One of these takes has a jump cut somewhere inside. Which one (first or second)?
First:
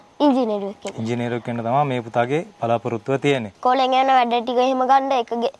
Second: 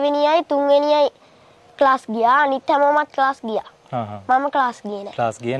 first